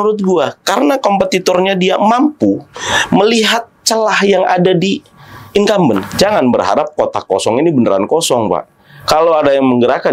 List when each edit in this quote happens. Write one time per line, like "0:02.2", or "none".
0:06.1